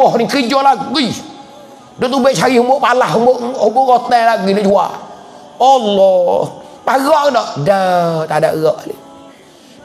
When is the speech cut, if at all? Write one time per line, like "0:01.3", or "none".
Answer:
none